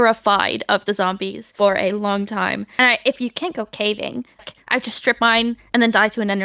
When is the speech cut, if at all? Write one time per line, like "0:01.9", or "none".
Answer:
none